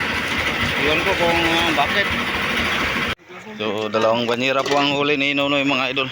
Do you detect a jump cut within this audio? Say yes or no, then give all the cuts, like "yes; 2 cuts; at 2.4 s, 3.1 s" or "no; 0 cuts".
yes; 1 cut; at 3.1 s